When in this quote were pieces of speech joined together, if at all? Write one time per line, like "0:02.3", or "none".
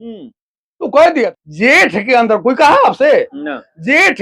0:01.4